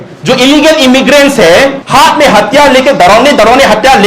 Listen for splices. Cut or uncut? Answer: cut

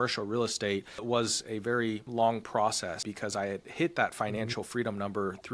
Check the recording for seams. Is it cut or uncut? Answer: cut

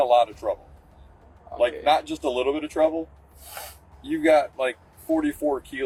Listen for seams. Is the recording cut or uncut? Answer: uncut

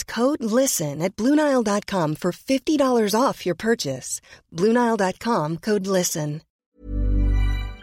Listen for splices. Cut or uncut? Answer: cut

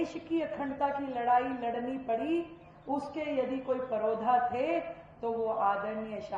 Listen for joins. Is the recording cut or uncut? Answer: uncut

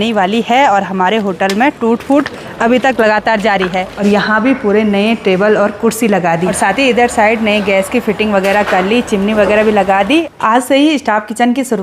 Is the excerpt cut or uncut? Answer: cut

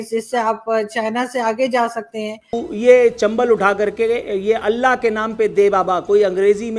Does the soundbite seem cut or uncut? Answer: cut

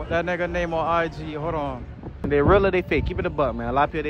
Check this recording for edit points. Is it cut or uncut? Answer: cut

